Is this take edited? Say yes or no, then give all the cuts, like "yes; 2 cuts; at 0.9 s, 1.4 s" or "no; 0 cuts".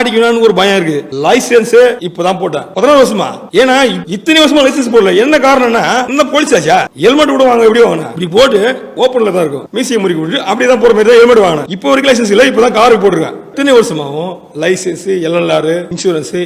yes; 2 cuts; at 1.0 s, 2.3 s